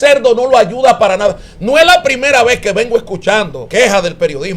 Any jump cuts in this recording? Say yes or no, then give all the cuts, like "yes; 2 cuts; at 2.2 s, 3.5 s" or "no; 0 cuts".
yes; 1 cut; at 3.6 s